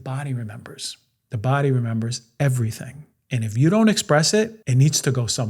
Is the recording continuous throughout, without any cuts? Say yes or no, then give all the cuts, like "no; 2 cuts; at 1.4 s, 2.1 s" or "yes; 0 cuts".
no; 1 cut; at 4.6 s